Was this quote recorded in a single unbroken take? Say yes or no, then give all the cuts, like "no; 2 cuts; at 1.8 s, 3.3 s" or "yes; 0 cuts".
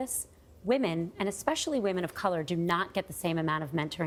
yes; 0 cuts